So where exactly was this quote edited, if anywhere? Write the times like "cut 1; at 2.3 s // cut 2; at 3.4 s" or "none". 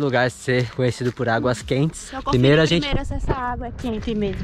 none